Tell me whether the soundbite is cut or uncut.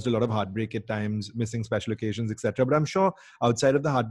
uncut